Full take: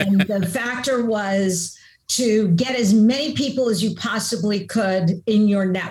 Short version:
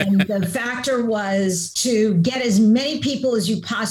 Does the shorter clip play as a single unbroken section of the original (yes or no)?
no